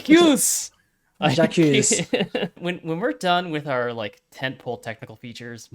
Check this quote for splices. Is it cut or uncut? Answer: cut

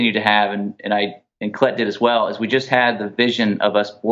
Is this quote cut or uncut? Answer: uncut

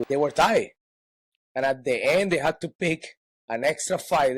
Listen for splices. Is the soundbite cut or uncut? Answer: uncut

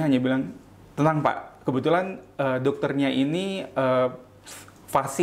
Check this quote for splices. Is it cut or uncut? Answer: uncut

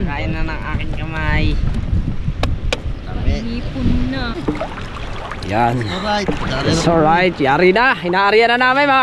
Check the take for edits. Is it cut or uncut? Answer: cut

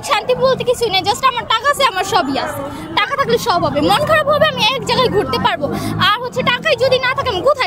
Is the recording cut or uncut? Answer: uncut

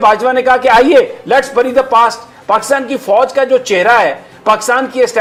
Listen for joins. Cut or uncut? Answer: uncut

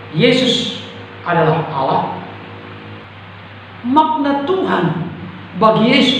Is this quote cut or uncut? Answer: cut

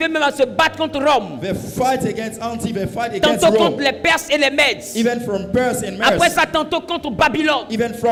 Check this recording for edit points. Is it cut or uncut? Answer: uncut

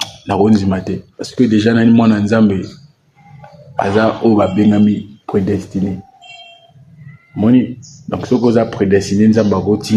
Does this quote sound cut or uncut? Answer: uncut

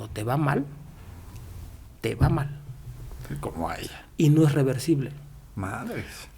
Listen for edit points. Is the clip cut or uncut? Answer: uncut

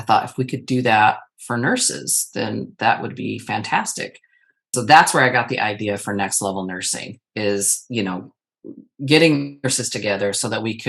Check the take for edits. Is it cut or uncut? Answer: uncut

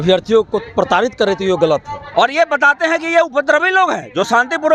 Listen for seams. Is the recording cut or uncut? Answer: cut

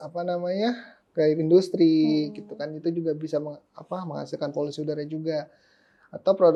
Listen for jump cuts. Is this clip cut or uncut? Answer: uncut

